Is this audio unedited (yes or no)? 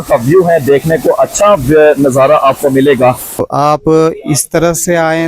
no